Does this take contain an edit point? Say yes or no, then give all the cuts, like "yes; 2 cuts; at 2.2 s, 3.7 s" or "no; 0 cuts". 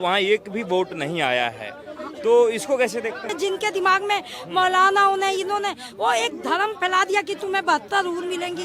yes; 1 cut; at 3.3 s